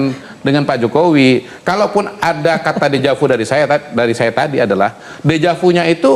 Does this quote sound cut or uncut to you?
uncut